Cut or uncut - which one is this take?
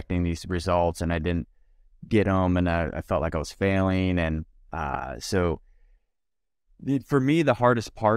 uncut